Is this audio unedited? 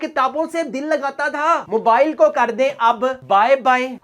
no; 1 cut; at 1.6 s

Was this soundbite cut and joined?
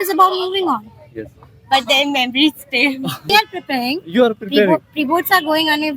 yes; 1 cut; at 3.3 s

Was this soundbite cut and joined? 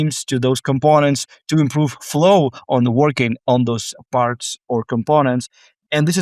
no; 0 cuts

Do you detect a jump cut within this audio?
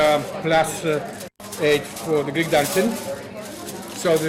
no; 0 cuts

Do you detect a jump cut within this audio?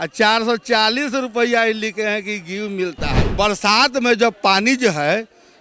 yes; 1 cut; at 3.2 s

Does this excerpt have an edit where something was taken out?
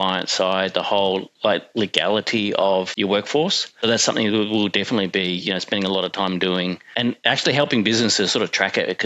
yes; 3 cuts; at 2.9 s, 3.8 s, 6.9 s

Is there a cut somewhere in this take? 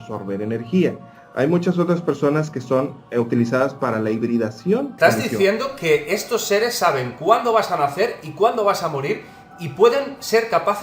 yes; 1 cut; at 4.9 s

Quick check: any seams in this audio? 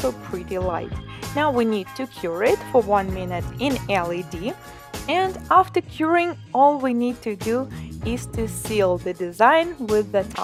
no; 0 cuts

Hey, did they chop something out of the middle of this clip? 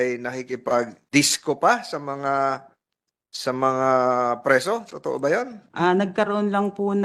yes; 2 cuts; at 1.0 s, 5.6 s

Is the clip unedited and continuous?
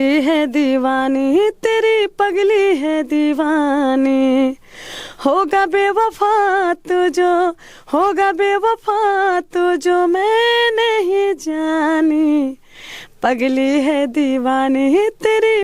yes; 0 cuts

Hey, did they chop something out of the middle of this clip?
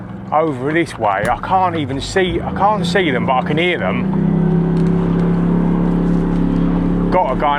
no; 0 cuts

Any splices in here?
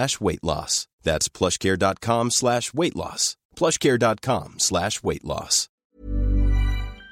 yes; 1 cut; at 5.8 s

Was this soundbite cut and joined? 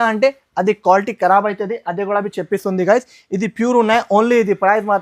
no; 0 cuts

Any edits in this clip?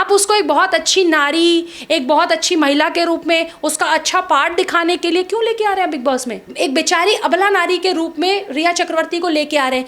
yes; 1 cut; at 6.4 s

